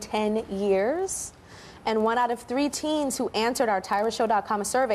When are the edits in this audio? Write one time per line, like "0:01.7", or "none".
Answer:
0:02.4